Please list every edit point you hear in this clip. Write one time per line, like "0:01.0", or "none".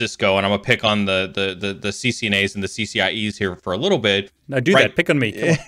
none